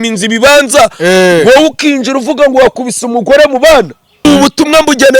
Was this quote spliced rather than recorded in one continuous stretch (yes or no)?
yes